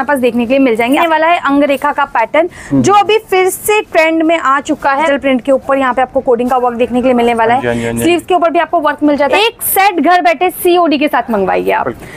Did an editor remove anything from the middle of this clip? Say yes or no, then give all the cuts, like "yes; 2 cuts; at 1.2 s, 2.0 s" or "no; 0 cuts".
yes; 3 cuts; at 1.0 s, 5.1 s, 9.3 s